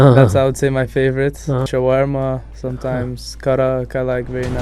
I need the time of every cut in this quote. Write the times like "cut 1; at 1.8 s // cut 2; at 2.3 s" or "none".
cut 1; at 1.7 s